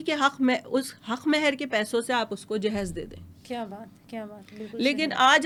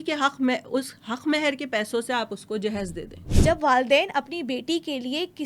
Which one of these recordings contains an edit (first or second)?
second